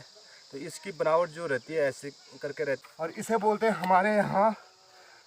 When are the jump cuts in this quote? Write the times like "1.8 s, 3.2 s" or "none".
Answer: 2.8 s